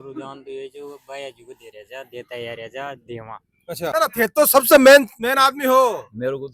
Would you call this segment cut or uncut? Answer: cut